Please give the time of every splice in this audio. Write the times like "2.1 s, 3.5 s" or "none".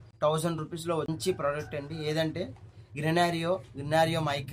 1.1 s